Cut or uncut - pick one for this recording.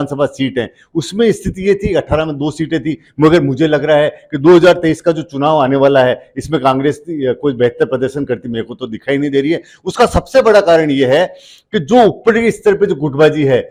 uncut